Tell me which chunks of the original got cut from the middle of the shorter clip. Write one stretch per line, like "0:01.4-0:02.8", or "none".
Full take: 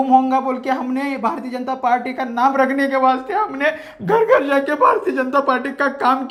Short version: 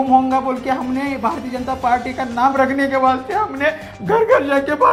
none